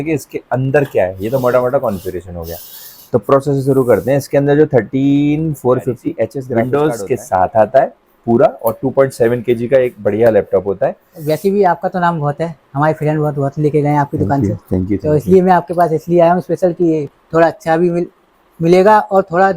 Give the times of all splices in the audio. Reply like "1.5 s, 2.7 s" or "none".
6.5 s, 11.1 s